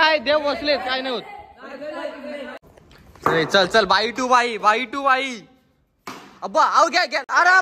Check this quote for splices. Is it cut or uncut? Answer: cut